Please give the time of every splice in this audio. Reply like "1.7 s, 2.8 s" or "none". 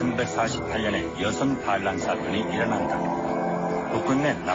2.8 s

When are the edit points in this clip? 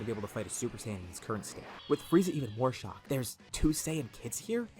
1.7 s, 3.2 s

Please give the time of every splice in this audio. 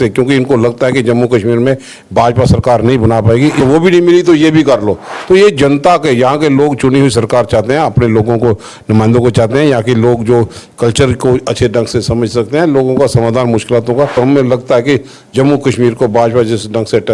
3.6 s, 14.2 s

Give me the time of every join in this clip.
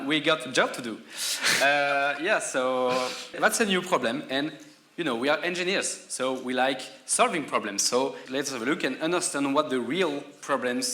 3.4 s, 8.2 s

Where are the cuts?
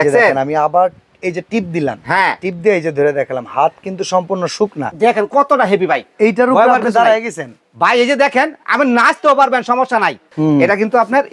4.8 s, 10.2 s

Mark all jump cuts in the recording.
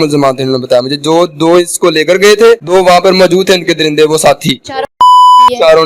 2.6 s

